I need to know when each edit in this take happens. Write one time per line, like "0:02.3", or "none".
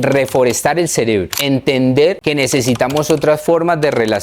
0:01.3
0:02.2